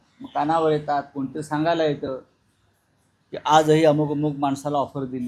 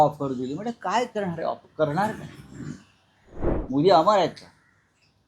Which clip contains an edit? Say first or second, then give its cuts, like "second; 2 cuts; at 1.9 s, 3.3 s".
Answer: second; 1 cut; at 3.6 s